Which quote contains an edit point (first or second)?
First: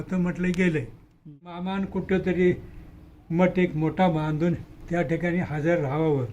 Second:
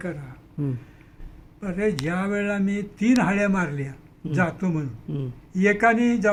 first